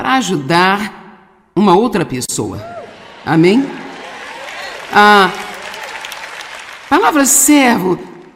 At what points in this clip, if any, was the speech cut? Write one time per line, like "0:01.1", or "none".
none